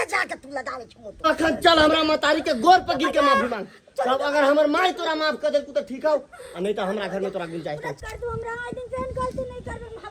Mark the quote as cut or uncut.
cut